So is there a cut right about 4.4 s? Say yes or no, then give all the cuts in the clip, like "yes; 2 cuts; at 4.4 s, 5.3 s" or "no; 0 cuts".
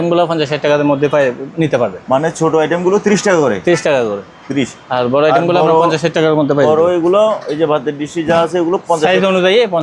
no; 0 cuts